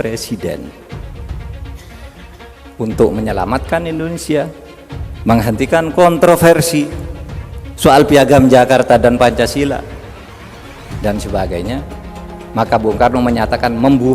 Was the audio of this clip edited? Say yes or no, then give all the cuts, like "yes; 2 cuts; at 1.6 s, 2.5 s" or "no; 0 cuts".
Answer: yes; 2 cuts; at 0.8 s, 2.4 s